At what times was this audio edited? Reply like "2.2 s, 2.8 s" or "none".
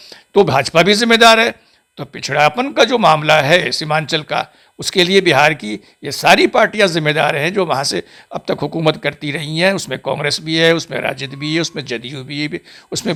none